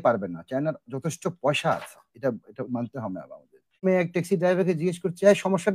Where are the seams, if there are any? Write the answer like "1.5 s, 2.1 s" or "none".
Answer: 3.8 s